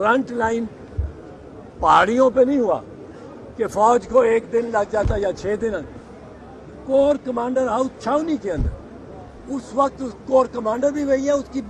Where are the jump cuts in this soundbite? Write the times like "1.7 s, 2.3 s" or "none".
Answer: none